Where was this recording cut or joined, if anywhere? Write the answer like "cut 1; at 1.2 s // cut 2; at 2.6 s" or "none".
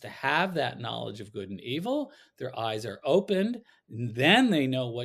none